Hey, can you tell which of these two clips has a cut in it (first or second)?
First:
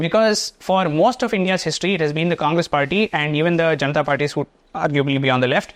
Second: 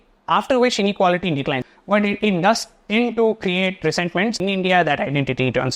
second